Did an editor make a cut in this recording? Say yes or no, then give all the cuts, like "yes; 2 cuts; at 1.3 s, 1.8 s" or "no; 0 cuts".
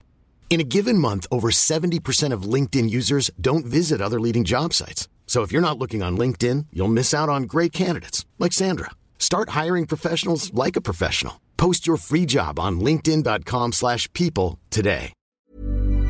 yes; 1 cut; at 15.2 s